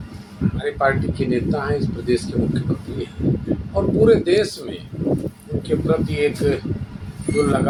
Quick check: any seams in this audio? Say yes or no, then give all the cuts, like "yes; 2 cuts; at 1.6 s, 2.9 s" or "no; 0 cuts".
no; 0 cuts